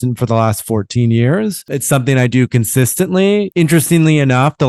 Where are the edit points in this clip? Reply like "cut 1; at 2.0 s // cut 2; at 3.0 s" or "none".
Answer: cut 1; at 1.7 s // cut 2; at 3.5 s